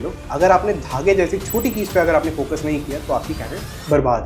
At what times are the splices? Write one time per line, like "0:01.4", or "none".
none